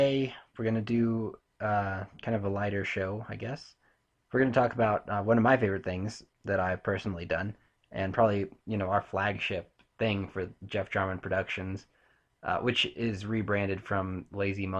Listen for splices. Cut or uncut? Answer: uncut